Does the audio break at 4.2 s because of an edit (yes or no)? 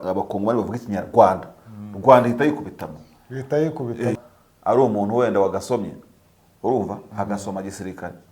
yes